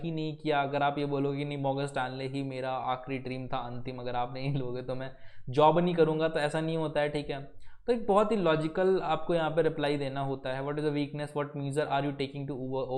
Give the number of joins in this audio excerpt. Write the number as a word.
zero